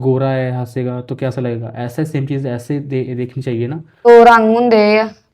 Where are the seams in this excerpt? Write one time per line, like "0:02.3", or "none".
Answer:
0:04.1